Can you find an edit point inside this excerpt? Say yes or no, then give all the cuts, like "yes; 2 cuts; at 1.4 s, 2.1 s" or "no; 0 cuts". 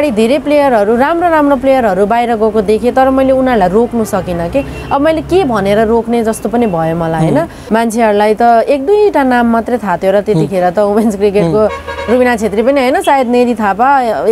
yes; 1 cut; at 7.6 s